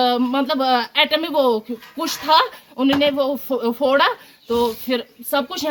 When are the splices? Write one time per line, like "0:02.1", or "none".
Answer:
none